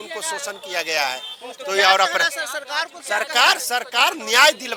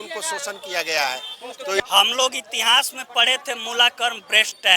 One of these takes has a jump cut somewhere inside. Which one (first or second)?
second